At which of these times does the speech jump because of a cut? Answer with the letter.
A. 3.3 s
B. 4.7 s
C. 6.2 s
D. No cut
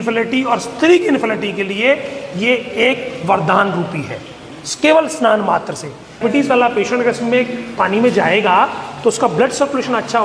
C